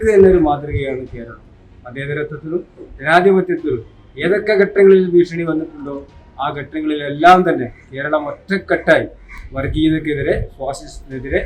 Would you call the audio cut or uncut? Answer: uncut